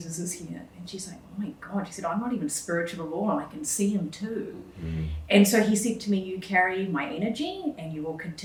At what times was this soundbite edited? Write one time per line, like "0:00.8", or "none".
none